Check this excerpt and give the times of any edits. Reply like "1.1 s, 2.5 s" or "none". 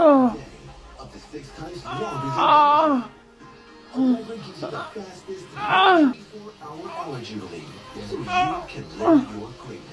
6.3 s